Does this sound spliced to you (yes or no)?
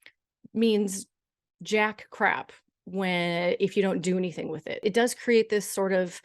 yes